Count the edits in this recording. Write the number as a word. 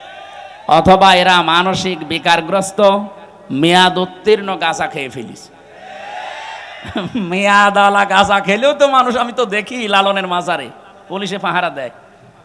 zero